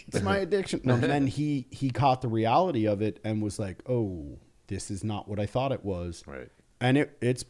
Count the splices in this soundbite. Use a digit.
1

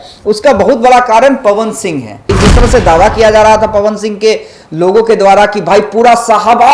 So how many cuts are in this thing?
1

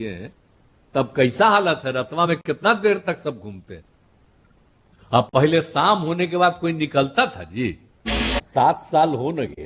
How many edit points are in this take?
1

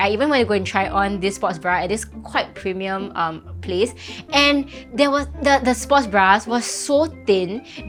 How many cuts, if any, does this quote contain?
0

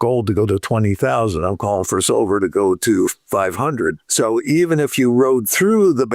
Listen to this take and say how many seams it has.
1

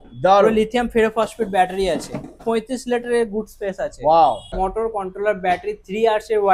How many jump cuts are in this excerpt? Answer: 2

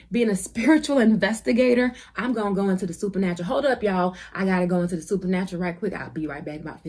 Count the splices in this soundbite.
0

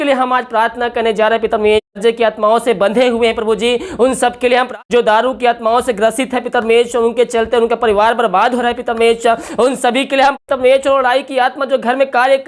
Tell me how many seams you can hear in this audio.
3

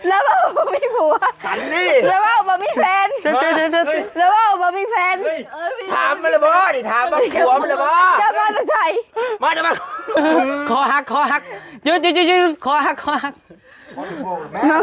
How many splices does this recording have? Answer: 1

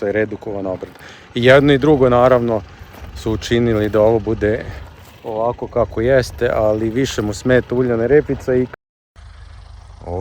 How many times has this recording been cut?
1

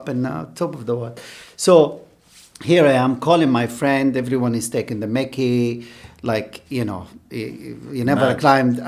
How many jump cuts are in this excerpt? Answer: 0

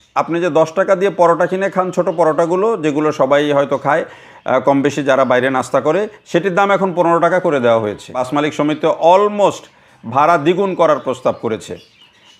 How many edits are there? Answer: 1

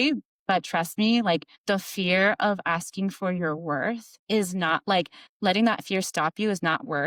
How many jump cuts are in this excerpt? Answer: 0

